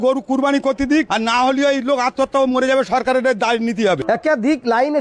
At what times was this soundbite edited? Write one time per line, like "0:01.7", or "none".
0:01.1
0:04.0